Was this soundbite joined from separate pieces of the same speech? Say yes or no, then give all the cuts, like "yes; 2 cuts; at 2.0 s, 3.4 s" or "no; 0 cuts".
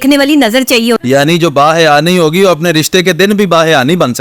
yes; 1 cut; at 1.0 s